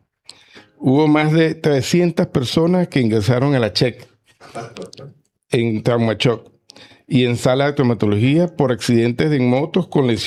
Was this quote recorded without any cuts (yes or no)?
yes